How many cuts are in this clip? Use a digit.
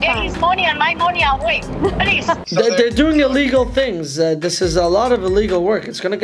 1